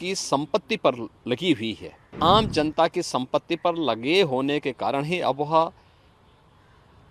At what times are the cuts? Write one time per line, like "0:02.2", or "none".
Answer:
0:02.2